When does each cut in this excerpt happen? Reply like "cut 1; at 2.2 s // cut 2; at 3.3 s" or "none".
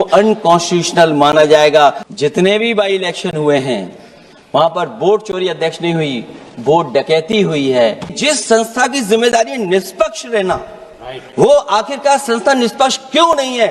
cut 1; at 2.1 s // cut 2; at 8.1 s